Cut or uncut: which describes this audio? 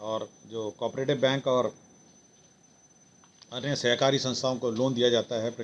uncut